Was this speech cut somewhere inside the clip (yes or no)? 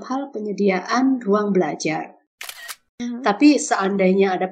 yes